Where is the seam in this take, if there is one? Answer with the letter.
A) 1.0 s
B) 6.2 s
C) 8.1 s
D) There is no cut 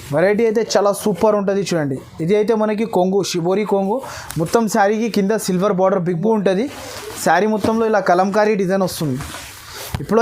B